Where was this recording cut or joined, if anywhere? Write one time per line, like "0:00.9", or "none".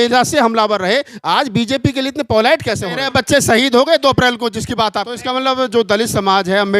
0:02.9
0:05.3